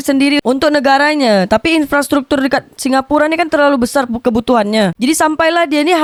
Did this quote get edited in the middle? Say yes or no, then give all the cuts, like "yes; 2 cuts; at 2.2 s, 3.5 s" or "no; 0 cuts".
no; 0 cuts